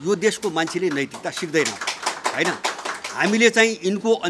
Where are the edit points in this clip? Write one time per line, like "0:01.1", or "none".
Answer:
none